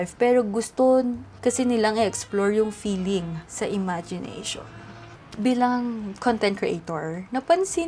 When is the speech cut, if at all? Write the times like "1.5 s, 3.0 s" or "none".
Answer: 0.8 s, 3.4 s, 5.0 s